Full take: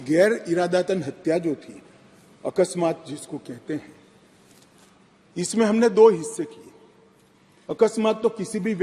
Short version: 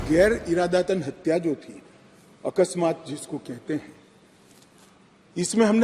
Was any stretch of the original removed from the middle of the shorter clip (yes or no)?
no